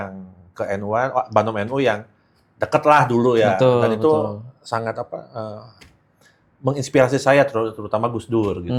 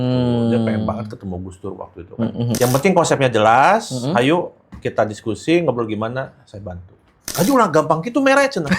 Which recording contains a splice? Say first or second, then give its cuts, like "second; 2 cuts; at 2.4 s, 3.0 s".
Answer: second; 2 cuts; at 2.6 s, 7.3 s